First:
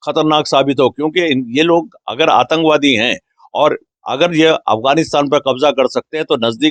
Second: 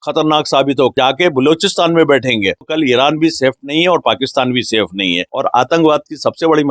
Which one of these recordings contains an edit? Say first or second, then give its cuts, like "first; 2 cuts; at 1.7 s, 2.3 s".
second; 3 cuts; at 0.9 s, 2.6 s, 5.3 s